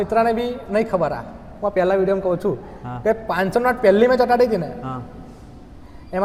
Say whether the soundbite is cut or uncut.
uncut